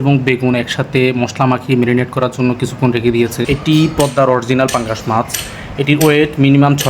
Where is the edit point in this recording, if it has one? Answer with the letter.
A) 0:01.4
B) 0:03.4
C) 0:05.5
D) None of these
B